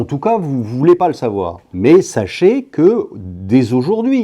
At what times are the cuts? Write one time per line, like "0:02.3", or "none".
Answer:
0:01.6